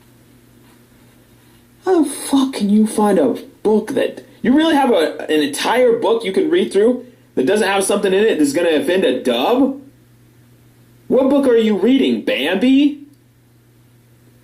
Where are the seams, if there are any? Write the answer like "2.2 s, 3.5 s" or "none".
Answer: 5.2 s